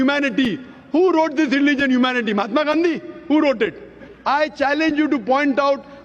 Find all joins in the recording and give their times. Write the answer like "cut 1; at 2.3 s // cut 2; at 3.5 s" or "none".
cut 1; at 4.1 s